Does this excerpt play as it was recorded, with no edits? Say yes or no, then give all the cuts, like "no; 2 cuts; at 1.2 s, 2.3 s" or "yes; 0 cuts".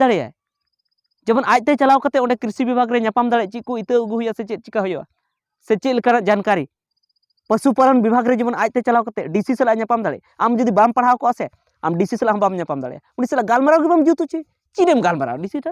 yes; 0 cuts